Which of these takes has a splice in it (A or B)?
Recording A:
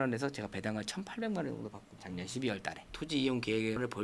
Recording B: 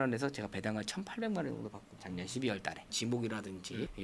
A